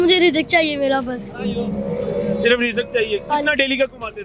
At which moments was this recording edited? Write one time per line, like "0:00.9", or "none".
none